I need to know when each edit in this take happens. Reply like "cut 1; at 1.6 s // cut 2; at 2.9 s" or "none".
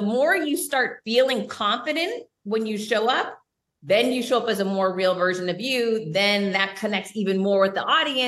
cut 1; at 1.0 s

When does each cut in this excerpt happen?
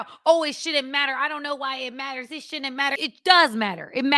cut 1; at 3.0 s

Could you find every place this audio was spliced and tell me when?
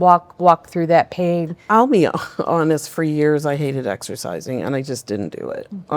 cut 1; at 1.6 s

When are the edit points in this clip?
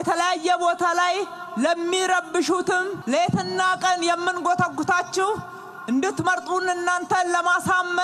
cut 1; at 3.0 s

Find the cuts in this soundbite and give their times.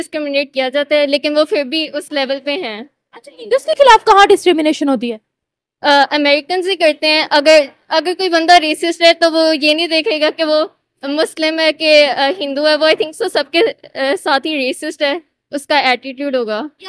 none

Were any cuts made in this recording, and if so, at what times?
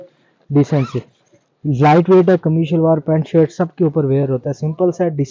none

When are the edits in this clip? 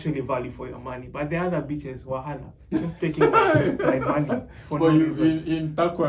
none

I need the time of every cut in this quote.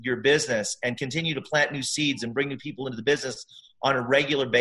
cut 1; at 1.0 s

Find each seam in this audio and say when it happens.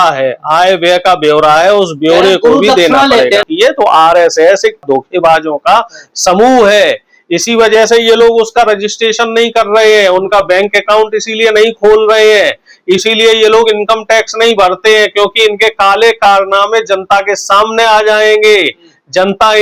cut 1; at 3.5 s

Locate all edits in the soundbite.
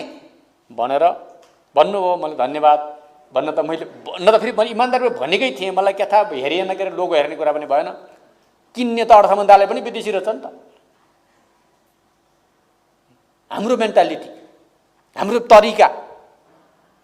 none

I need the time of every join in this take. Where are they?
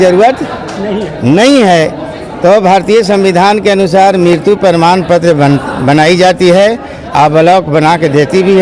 none

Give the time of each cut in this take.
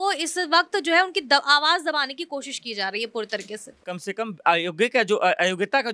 cut 1; at 3.8 s

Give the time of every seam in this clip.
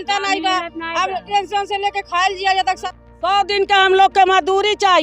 cut 1; at 2.8 s

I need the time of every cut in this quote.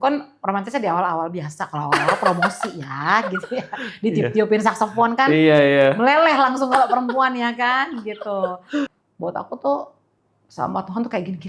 cut 1; at 9.0 s

